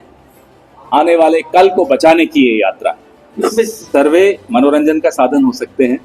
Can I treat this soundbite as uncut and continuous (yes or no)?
no